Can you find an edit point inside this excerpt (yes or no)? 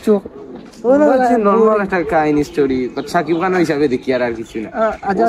no